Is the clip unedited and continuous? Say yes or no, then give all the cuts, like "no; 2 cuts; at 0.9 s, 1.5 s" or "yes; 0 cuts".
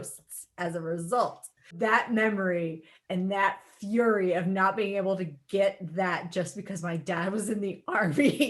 no; 1 cut; at 1.7 s